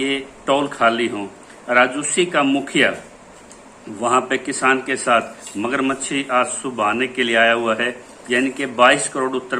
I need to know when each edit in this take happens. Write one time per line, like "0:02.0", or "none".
0:08.1

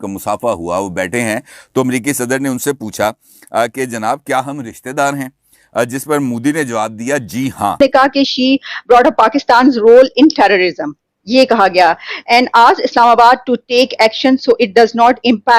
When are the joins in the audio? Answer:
0:07.8

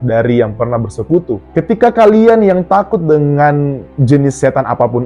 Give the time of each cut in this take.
0:01.4

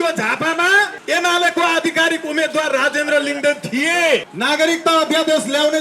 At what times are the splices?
0:01.0
0:04.3

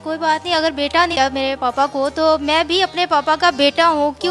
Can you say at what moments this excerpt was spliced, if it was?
0:01.1

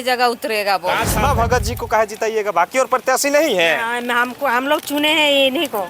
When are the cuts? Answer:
0:01.1

